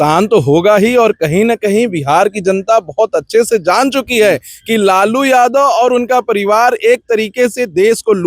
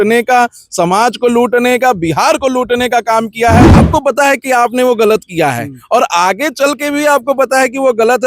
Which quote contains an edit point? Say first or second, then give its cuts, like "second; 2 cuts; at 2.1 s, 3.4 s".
second; 1 cut; at 3.8 s